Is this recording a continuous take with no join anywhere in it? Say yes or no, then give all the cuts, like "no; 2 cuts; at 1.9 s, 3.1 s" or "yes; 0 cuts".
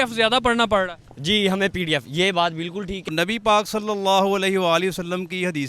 no; 1 cut; at 3.0 s